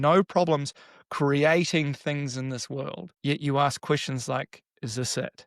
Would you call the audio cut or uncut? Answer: cut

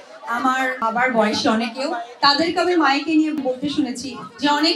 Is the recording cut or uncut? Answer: cut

